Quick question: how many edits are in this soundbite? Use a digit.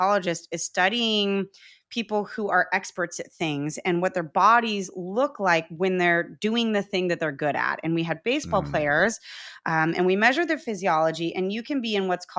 0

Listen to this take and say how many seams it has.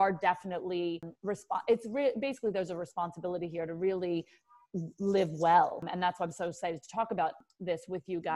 3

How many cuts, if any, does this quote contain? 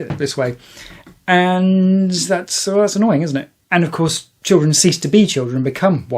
1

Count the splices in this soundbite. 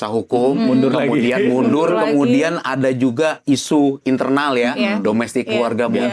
0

